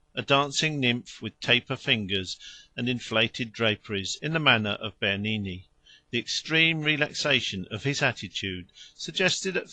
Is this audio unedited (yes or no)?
yes